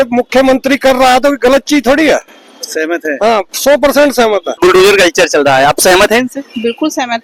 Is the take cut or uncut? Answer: uncut